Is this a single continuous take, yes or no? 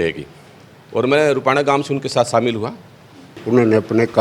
no